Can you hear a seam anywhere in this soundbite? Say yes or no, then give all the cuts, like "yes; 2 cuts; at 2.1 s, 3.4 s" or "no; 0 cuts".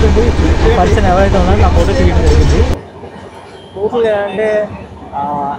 yes; 1 cut; at 2.8 s